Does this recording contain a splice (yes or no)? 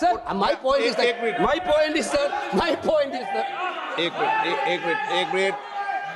no